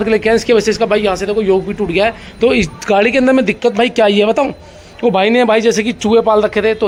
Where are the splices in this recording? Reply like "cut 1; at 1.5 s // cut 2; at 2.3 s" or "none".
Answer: none